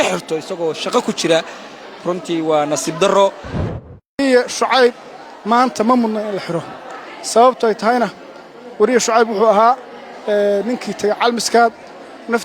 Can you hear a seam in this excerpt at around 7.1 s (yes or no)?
no